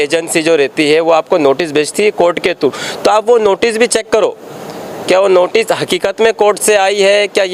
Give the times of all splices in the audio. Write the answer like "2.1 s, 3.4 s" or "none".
none